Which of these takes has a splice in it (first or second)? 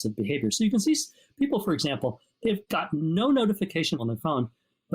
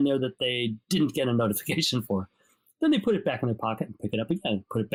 first